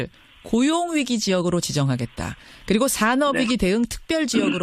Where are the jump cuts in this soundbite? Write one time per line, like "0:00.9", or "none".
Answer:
0:03.5